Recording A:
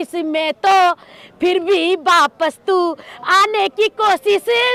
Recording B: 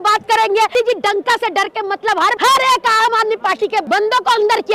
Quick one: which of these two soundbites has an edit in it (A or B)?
B